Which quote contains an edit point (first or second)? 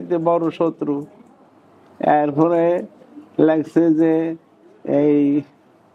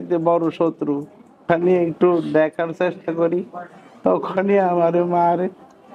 second